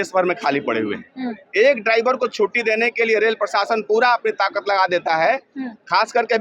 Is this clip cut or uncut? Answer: uncut